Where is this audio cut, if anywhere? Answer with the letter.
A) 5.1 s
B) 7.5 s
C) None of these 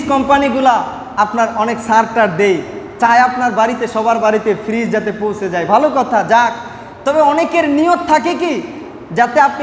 C